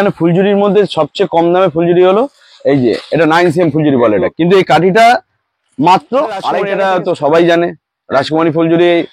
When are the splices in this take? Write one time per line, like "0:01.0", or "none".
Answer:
0:04.3
0:06.6